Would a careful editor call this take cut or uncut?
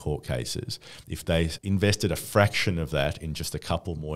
cut